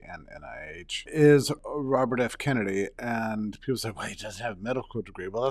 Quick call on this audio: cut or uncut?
cut